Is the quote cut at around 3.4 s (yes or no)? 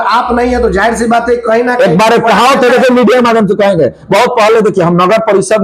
no